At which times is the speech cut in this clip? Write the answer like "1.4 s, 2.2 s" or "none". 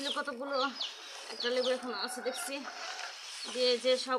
none